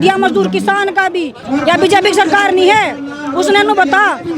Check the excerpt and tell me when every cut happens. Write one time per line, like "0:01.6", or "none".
0:01.4

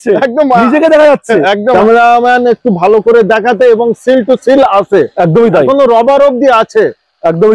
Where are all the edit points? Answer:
0:01.7

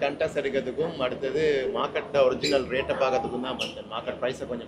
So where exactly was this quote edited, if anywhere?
none

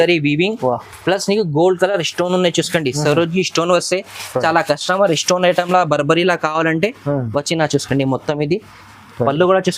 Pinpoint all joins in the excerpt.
none

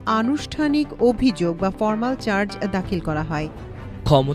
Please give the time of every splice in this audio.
0:03.3

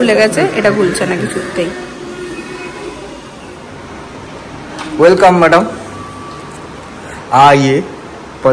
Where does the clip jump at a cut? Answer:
0:03.5

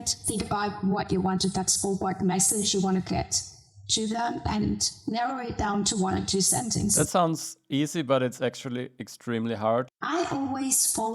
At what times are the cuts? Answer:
0:06.9
0:09.9

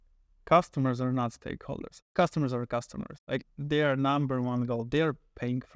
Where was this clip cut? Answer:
0:02.0
0:03.4

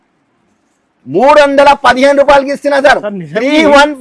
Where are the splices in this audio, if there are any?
none

